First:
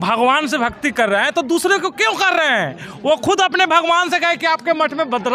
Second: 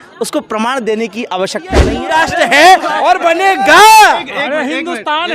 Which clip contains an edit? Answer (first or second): second